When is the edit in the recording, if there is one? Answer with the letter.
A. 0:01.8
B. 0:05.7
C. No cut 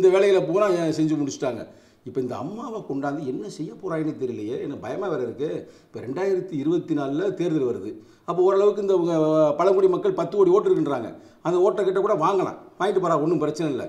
C